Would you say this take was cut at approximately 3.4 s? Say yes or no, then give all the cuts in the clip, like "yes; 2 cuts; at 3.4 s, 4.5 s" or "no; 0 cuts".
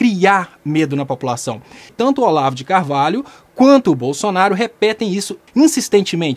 no; 2 cuts; at 1.8 s, 5.4 s